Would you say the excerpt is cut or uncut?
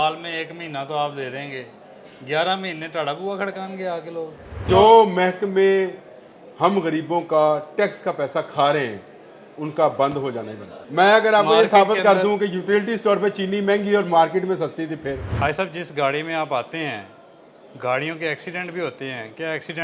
cut